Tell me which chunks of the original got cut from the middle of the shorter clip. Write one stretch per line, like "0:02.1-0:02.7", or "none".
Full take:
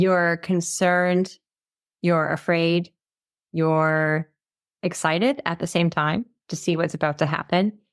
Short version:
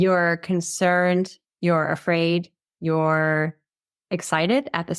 0:01.4-0:01.8
0:03.0-0:03.3